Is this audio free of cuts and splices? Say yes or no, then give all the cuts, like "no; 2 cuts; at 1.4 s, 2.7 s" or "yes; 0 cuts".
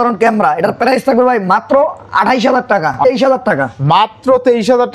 no; 1 cut; at 3.0 s